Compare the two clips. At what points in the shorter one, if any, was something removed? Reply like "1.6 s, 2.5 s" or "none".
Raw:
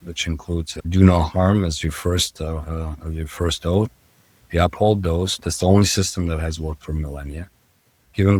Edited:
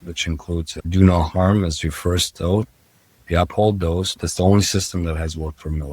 2.3 s